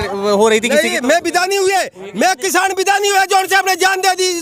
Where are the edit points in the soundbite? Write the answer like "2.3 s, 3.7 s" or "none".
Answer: none